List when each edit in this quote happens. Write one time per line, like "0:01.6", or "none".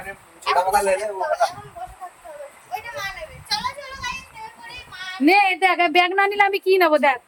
none